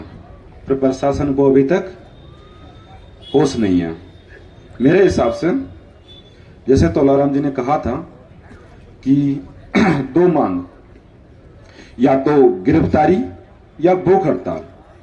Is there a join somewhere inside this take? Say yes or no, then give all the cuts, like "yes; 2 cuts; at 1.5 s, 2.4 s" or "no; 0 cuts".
no; 0 cuts